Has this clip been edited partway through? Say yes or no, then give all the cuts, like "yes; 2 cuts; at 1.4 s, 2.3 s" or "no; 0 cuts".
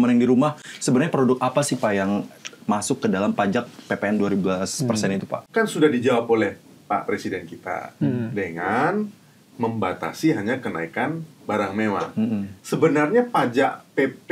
yes; 1 cut; at 5.4 s